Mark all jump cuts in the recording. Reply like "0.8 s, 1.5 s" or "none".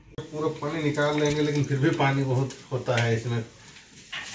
none